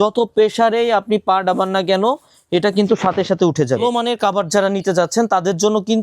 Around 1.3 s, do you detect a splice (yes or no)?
no